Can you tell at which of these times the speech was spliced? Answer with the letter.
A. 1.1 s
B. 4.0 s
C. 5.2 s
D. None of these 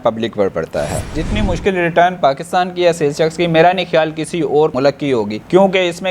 A